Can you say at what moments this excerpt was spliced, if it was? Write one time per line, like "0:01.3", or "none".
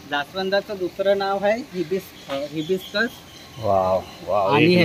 none